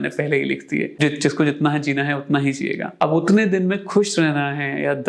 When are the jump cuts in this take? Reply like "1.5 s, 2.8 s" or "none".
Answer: 0.9 s, 2.9 s